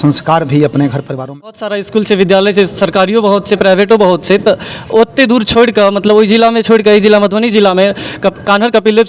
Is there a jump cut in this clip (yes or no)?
yes